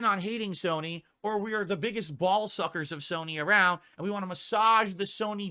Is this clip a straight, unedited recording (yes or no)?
yes